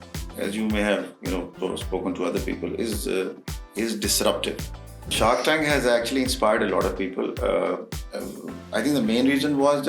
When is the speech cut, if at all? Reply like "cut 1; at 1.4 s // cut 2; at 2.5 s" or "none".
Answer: cut 1; at 5.1 s